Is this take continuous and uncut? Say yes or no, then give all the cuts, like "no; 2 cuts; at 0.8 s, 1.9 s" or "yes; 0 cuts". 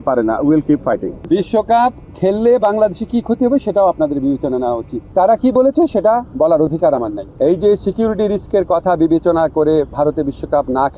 no; 3 cuts; at 1.1 s, 5.1 s, 7.2 s